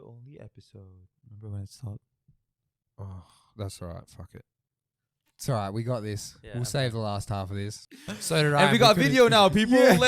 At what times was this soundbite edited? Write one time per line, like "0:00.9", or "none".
0:07.7